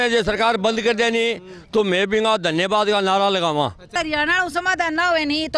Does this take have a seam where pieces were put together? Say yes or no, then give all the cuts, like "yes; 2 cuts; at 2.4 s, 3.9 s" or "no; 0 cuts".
yes; 1 cut; at 3.9 s